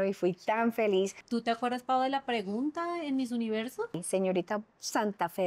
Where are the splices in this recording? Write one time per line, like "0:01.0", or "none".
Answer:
0:01.2
0:04.0

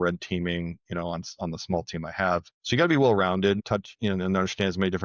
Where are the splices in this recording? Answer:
0:02.5
0:03.6

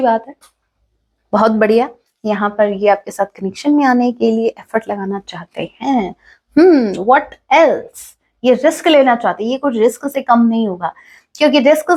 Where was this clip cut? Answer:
none

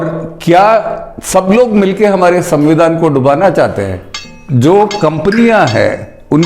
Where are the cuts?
0:04.2

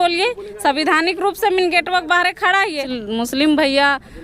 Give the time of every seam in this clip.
0:02.9

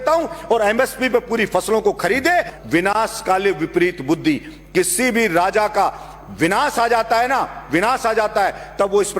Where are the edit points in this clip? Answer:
0:02.5

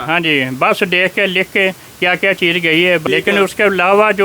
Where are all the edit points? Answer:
0:03.0

